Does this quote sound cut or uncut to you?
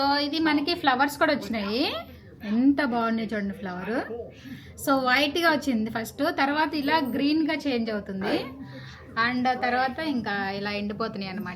uncut